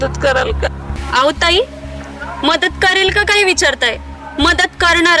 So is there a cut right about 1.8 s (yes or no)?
no